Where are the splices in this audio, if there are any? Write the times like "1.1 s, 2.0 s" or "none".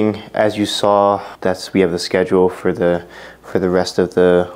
1.3 s